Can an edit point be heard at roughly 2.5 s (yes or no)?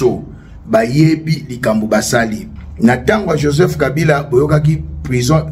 yes